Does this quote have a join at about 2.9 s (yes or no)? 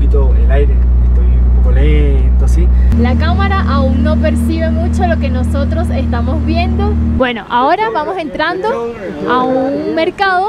yes